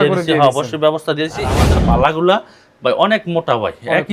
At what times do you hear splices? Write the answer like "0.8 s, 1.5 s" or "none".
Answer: 1.6 s